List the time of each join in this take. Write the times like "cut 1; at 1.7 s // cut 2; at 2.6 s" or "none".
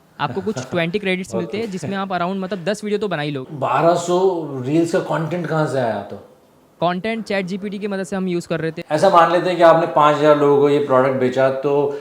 cut 1; at 3.5 s // cut 2; at 8.8 s